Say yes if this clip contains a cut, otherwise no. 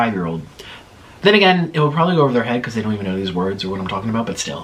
no